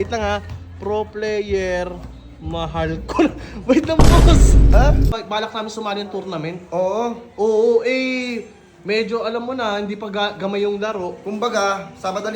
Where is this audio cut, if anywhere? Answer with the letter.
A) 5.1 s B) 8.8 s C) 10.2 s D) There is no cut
A